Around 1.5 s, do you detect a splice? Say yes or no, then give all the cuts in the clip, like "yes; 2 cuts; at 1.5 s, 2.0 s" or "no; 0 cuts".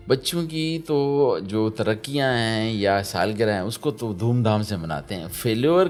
no; 0 cuts